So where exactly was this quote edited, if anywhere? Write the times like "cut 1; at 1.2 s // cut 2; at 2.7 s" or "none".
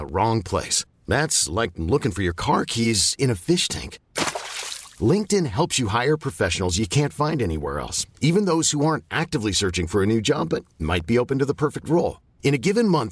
none